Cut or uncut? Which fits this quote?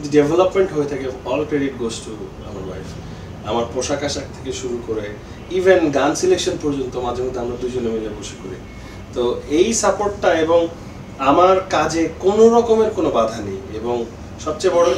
uncut